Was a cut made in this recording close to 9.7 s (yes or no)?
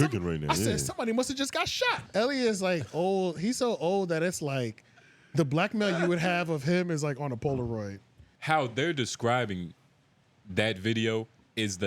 no